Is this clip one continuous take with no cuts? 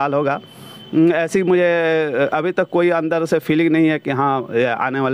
yes; 0 cuts

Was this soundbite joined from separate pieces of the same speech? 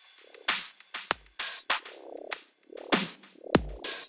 no; 0 cuts

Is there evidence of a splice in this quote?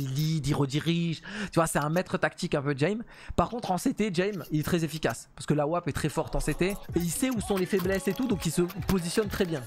yes; 1 cut; at 6.8 s

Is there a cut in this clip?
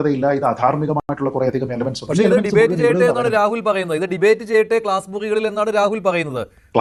no; 0 cuts

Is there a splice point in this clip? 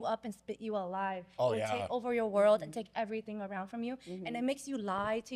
no; 0 cuts

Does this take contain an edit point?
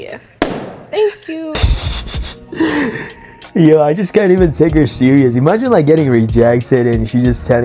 no; 0 cuts

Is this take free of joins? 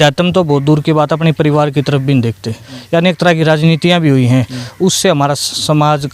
no; 1 cut; at 2.7 s

